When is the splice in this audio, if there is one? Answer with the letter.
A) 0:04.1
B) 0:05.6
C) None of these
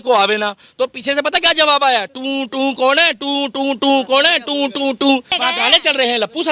B